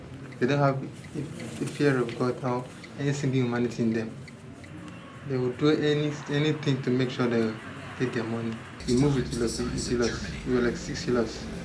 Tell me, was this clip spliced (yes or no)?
yes